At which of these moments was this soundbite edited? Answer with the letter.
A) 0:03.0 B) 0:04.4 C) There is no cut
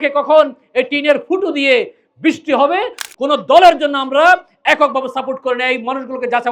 A